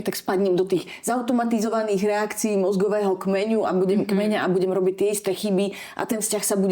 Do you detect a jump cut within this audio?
no; 0 cuts

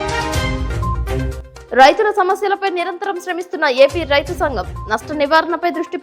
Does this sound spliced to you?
yes; 1 cut; at 1.5 s

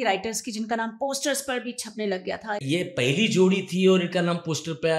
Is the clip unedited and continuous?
no; 1 cut; at 2.6 s

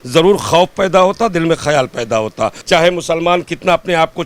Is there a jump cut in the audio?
yes; 1 cut; at 2.6 s

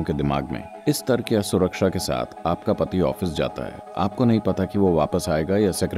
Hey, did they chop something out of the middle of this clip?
no; 0 cuts

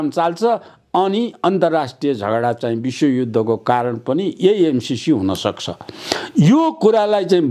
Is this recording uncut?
yes; 0 cuts

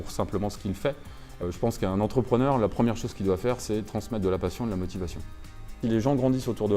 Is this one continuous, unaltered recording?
no; 2 cuts; at 1.4 s, 5.7 s

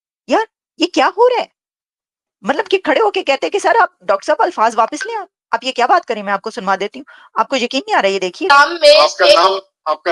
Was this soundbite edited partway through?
no; 0 cuts

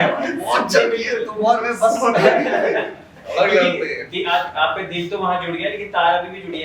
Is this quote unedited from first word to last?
yes; 0 cuts

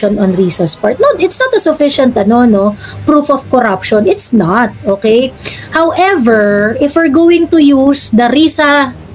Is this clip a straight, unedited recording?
yes; 0 cuts

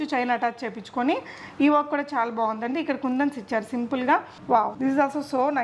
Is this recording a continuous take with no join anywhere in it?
no; 1 cut; at 4.5 s

